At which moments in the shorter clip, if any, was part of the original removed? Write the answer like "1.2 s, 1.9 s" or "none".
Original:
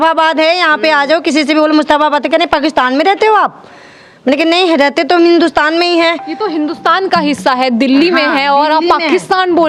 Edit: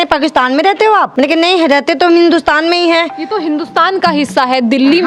1.1 s

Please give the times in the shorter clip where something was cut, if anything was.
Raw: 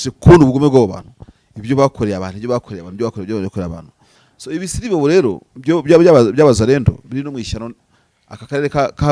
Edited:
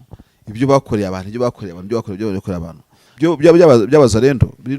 3.0 s

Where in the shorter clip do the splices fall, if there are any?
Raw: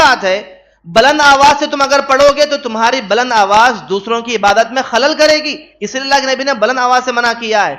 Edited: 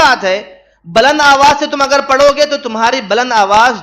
none

